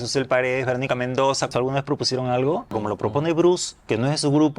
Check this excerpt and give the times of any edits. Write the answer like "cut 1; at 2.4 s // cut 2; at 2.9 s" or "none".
cut 1; at 1.5 s // cut 2; at 2.7 s